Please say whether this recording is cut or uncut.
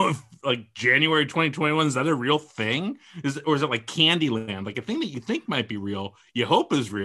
uncut